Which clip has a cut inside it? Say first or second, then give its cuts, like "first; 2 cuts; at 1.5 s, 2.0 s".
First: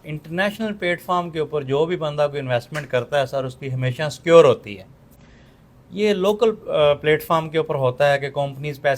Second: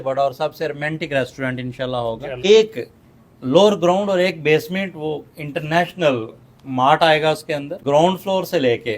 second; 2 cuts; at 2.3 s, 7.8 s